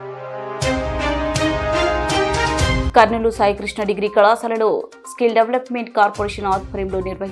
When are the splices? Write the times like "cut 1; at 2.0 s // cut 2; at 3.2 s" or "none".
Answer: cut 1; at 2.8 s

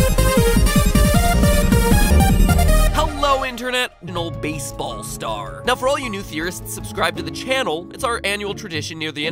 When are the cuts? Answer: none

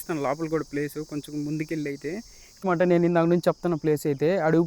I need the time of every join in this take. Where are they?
cut 1; at 2.6 s

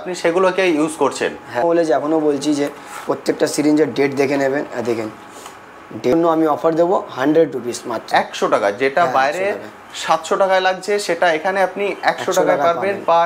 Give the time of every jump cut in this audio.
cut 1; at 1.6 s // cut 2; at 6.1 s

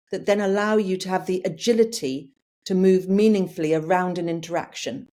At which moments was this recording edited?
none

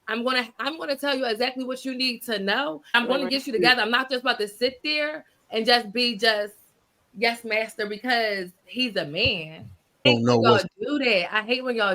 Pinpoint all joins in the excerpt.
cut 1; at 3.1 s // cut 2; at 9.6 s

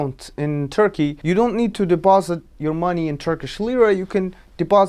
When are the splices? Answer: cut 1; at 1.2 s

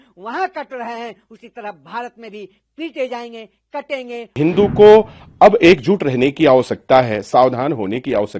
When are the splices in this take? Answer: cut 1; at 4.4 s

